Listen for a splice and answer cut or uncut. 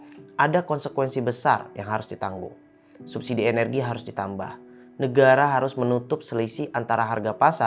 uncut